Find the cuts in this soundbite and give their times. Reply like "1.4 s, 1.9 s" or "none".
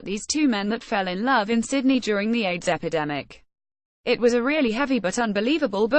none